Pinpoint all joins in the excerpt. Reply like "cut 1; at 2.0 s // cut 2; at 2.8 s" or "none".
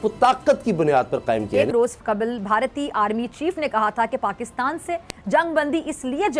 cut 1; at 1.5 s